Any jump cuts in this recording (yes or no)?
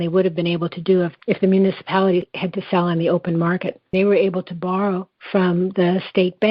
yes